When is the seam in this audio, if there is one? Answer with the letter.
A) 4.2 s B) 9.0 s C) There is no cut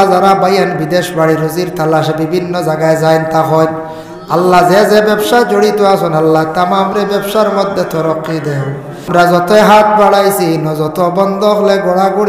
B